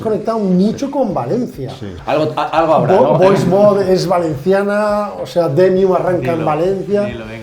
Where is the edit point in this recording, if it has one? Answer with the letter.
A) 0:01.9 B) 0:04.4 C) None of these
A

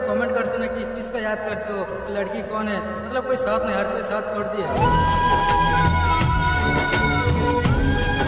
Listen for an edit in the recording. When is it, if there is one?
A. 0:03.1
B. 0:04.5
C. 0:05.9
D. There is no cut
D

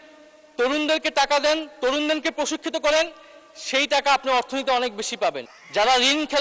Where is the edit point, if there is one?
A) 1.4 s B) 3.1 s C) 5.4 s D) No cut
C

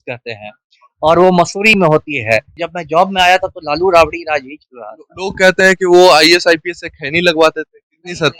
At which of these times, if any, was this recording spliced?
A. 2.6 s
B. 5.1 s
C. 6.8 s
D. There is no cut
A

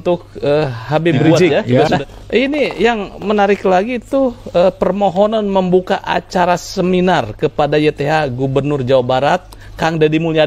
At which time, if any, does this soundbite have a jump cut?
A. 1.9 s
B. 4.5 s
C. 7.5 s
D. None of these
A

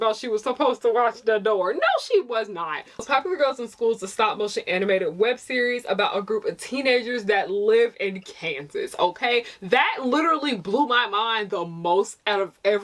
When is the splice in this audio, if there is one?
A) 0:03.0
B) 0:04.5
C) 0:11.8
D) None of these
A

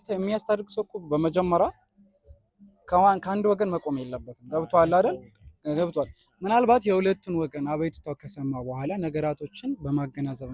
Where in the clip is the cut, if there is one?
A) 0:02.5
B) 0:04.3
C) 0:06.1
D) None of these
D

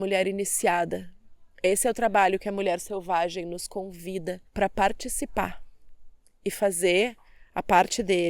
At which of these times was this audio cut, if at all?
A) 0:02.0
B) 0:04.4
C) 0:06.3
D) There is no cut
B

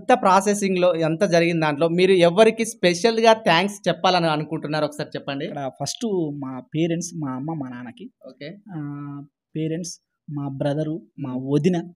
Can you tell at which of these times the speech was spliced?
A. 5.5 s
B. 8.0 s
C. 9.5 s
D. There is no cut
A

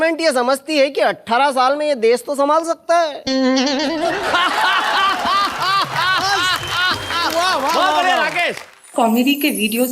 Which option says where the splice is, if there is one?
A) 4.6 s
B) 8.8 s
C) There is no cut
B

